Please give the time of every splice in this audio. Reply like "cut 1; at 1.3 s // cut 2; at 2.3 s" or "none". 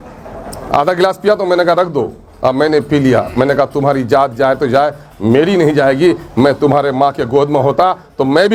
none